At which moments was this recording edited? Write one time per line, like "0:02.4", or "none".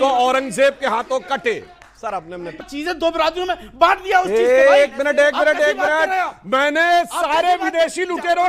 0:02.7